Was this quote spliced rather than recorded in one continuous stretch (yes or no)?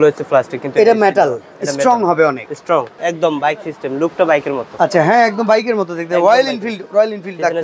yes